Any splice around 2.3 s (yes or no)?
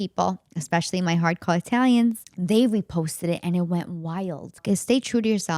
yes